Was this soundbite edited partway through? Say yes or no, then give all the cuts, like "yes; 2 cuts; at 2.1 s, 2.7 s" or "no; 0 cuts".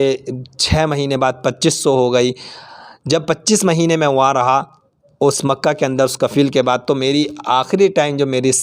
no; 0 cuts